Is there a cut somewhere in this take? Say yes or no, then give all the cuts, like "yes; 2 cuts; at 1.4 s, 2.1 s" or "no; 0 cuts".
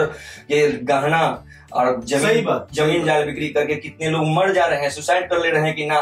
no; 0 cuts